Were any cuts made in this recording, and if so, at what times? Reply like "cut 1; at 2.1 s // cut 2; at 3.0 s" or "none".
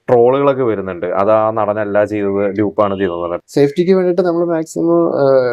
cut 1; at 3.3 s